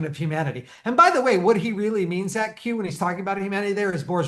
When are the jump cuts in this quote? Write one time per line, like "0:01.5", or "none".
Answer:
none